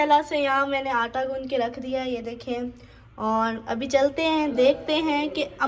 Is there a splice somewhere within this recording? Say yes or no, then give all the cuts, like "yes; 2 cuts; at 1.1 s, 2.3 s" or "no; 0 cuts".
no; 0 cuts